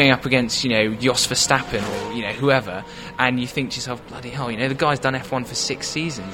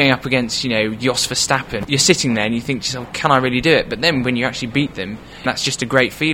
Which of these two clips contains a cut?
second; 2 cuts; at 1.8 s, 5.5 s

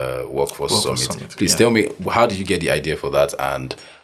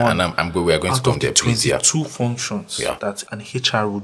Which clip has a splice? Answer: second; 1 cut; at 3.1 s

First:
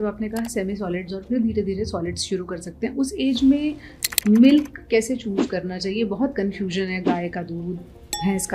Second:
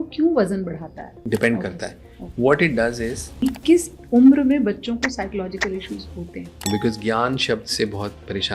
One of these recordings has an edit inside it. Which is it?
second; 3 cuts; at 1.2 s, 3.3 s, 6.6 s

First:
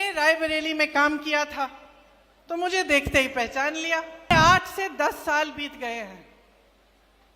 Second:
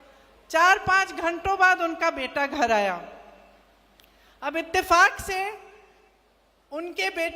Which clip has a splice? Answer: first; 1 cut; at 4.3 s

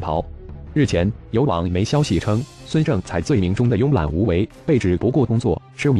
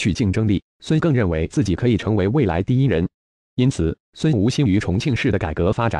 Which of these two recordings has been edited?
second; 1 cut; at 4.1 s

